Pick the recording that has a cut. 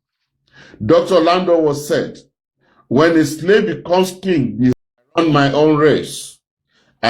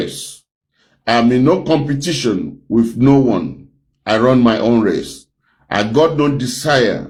first; 1 cut; at 4.7 s

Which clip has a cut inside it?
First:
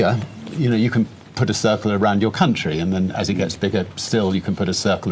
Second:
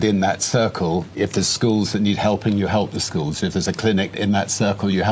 second; 2 cuts; at 1.1 s, 4.2 s

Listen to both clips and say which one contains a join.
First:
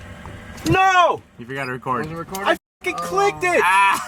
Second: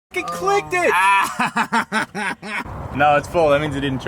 second; 1 cut; at 2.6 s

